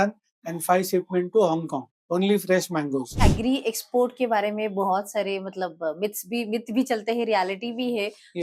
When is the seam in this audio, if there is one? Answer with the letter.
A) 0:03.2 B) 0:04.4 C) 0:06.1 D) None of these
A